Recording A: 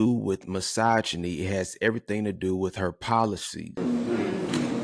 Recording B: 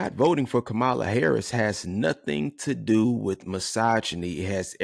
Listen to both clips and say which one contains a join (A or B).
A